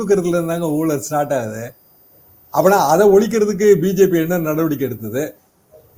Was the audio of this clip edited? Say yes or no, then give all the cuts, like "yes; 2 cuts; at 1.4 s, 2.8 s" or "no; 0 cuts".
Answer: no; 0 cuts